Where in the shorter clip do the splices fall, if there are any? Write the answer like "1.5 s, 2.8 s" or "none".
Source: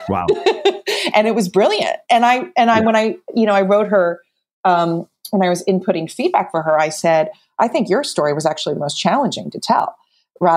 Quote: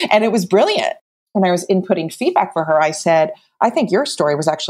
1.0 s